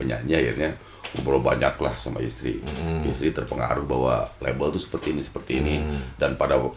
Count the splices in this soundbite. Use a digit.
0